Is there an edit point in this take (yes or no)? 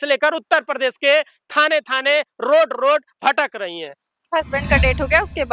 yes